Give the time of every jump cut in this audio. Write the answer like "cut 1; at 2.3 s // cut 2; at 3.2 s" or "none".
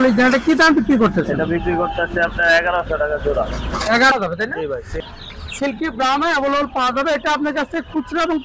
cut 1; at 4.1 s